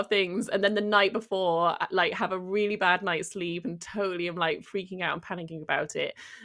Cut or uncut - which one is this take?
uncut